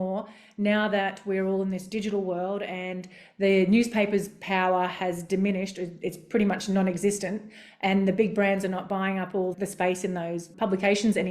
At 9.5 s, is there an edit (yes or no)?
yes